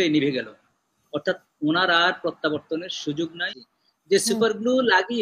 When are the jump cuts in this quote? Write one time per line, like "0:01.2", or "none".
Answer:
0:03.5